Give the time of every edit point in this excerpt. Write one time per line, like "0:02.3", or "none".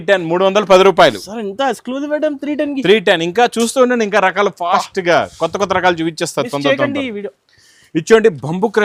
none